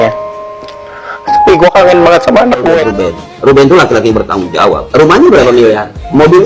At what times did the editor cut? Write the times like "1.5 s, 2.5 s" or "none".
2.9 s